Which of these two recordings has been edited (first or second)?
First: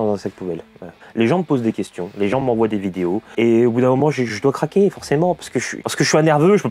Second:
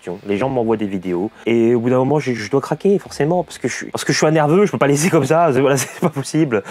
first